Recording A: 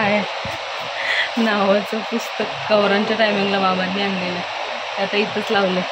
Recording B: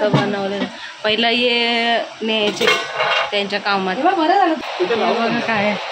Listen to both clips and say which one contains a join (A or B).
B